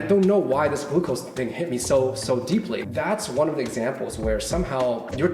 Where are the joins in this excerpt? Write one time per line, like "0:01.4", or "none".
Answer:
0:02.8